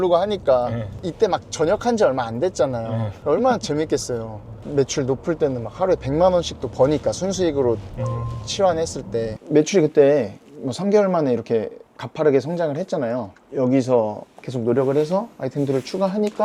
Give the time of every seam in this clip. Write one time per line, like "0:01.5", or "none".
0:09.4